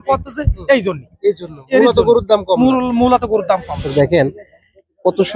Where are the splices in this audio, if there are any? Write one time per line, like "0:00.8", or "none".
0:03.8